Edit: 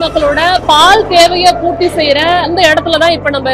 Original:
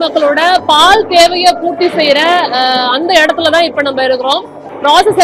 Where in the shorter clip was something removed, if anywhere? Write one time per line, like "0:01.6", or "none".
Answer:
0:02.5